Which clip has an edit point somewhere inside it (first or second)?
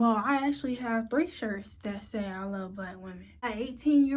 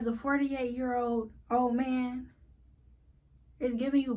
first